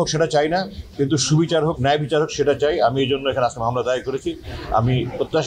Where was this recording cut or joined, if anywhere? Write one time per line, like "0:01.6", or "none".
none